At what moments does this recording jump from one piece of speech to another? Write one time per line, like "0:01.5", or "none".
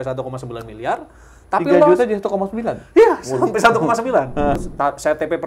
0:04.5